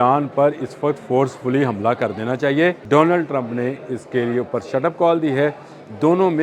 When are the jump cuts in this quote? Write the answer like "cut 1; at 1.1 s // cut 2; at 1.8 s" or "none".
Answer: cut 1; at 2.8 s